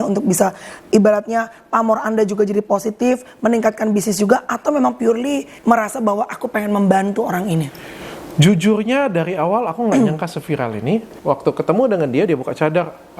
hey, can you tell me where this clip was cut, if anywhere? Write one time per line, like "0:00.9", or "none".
0:05.5
0:11.1

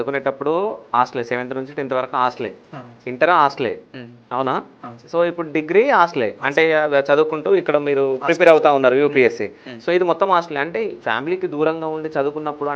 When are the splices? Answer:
none

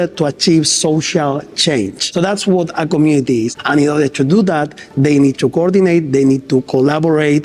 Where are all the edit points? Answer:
0:02.0
0:03.5

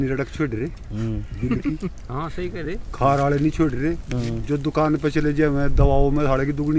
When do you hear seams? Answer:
none

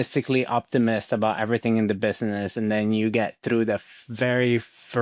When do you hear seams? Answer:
none

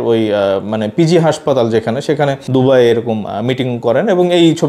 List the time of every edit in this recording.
0:02.4

